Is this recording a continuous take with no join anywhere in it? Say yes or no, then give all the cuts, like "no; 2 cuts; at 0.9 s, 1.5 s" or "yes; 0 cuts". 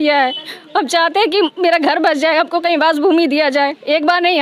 yes; 0 cuts